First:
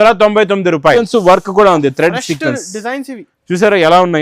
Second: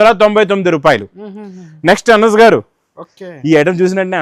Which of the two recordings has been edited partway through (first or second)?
first